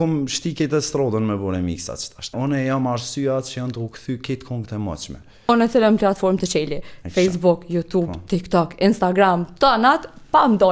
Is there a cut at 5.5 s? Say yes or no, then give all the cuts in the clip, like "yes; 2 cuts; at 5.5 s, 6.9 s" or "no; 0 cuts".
yes; 2 cuts; at 2.3 s, 5.5 s